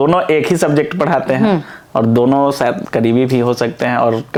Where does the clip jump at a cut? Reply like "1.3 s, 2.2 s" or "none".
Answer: none

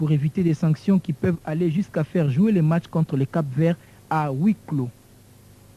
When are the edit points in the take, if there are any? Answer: 3.9 s

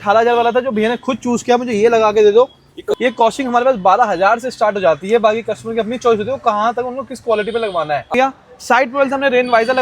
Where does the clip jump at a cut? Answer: 2.9 s, 8.1 s

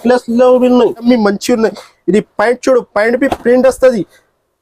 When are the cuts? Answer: 1.0 s

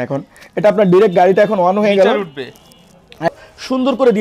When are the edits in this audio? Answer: 3.3 s

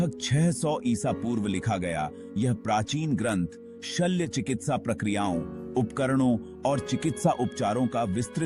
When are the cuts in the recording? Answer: none

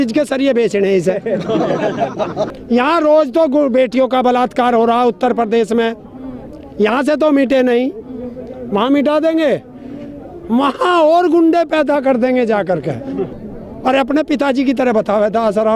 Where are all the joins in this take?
2.5 s, 13.4 s

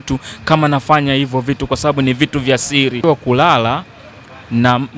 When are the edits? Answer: 3.0 s

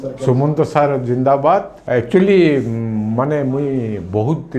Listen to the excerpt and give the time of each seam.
1.8 s

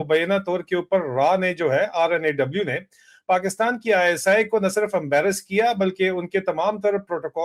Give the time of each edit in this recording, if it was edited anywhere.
none

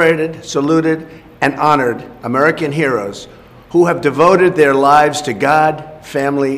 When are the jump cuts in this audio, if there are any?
none

